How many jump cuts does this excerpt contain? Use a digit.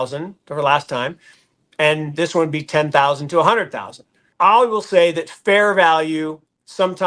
1